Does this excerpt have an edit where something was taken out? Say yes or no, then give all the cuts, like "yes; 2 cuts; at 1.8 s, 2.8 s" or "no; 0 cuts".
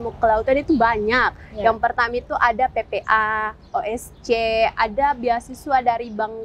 no; 0 cuts